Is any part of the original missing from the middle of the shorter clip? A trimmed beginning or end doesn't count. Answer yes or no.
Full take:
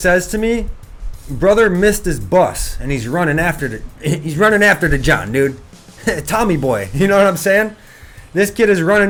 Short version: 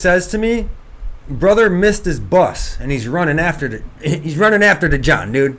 no